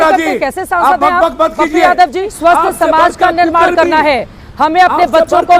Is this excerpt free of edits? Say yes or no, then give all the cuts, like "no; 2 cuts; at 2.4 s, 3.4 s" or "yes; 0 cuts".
no; 1 cut; at 2.3 s